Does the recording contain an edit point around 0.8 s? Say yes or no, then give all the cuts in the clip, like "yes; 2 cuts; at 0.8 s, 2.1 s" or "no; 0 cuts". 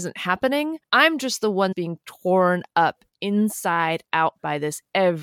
yes; 2 cuts; at 0.8 s, 1.7 s